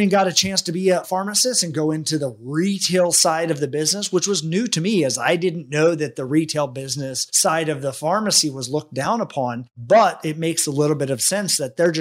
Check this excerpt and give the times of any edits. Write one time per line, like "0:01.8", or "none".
0:01.0

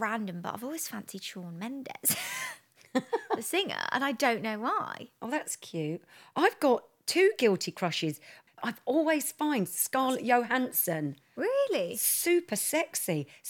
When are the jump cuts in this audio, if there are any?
0:08.4

